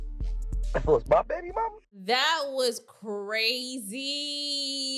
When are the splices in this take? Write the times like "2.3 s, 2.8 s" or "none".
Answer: 1.8 s